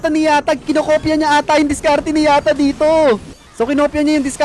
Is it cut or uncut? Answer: cut